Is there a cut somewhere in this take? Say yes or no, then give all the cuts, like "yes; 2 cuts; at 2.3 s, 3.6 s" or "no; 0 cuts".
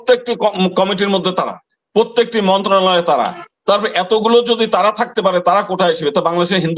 no; 0 cuts